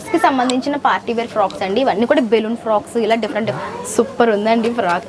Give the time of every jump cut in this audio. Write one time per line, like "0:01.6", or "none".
0:03.5